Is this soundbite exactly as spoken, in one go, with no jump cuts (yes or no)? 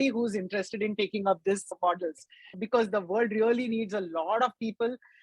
no